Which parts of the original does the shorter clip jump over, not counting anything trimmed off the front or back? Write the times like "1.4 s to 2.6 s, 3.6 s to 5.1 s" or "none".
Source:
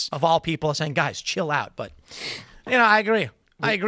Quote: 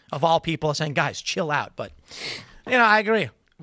none

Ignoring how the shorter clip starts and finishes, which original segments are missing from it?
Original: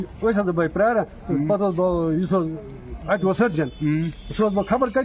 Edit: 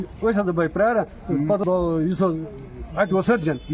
1.6 s to 1.7 s

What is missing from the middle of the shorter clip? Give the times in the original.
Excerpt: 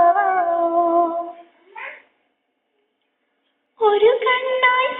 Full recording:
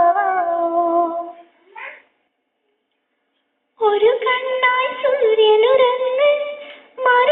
none

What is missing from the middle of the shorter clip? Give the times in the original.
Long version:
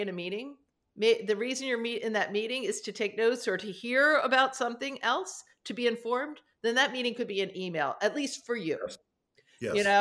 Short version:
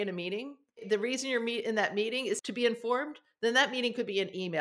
0.8 s to 1.2 s, 2.8 s to 5.7 s

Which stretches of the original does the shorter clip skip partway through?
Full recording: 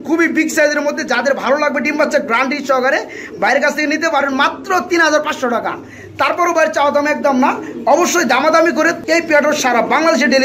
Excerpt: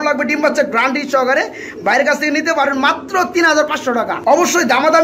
5.7 s to 7.7 s

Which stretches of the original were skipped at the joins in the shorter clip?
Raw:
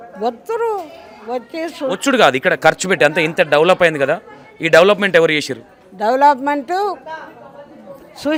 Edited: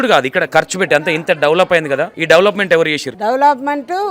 4.2 s to 4.6 s, 5.5 s to 5.9 s

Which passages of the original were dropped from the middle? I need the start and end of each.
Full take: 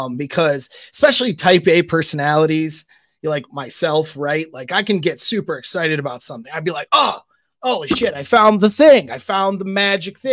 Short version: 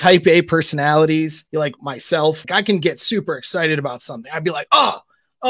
2.8 s to 3.1 s, 4.1 s to 4.6 s

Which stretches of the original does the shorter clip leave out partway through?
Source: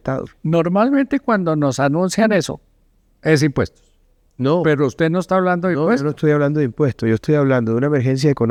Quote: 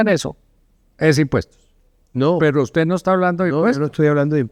none

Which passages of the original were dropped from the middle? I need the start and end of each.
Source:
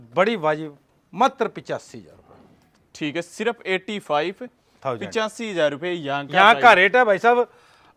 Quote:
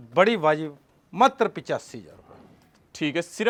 none

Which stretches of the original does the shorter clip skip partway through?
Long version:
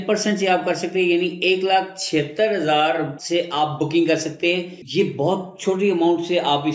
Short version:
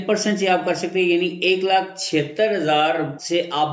none

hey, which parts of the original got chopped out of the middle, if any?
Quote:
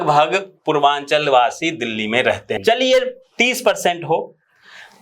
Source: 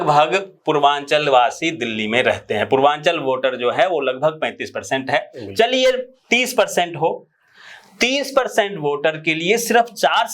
2.5 s to 5.4 s

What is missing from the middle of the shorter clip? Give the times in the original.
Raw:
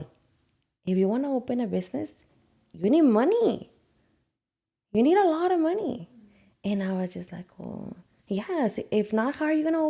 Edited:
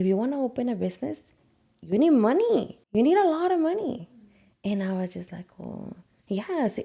3.7 s to 4.8 s

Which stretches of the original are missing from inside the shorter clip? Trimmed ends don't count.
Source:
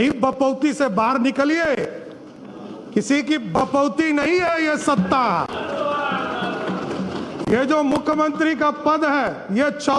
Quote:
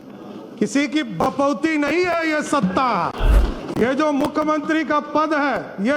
5.7 s to 7.1 s

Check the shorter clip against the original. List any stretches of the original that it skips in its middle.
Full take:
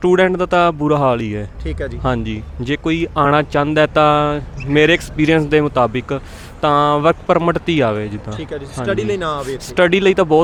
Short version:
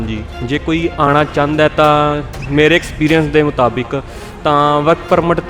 none

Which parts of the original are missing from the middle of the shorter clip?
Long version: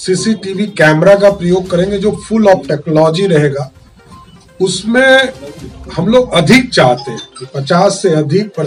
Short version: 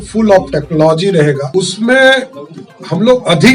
3.6 s to 4.5 s

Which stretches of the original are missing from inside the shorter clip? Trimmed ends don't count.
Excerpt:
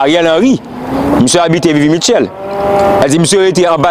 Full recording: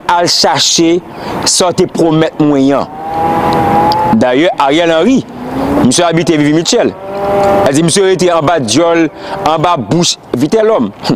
none

